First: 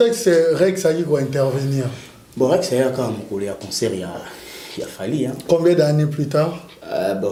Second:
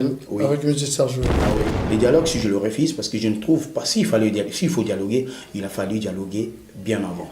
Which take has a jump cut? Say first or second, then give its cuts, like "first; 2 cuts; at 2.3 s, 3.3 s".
second; 1 cut; at 1.8 s